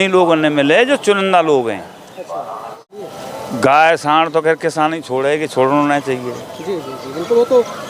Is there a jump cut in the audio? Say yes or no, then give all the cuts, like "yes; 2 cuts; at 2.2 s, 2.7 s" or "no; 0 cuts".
yes; 1 cut; at 3.0 s